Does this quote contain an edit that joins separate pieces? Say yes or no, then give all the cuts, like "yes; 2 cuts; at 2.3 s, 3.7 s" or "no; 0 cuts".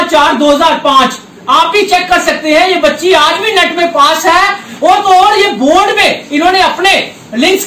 no; 0 cuts